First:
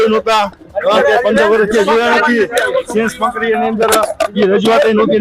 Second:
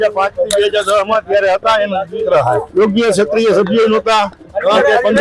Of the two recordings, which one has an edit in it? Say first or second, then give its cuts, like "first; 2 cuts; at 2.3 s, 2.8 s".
second; 1 cut; at 2.7 s